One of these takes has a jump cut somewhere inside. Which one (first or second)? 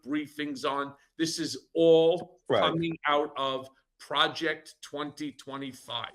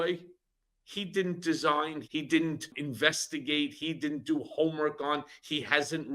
second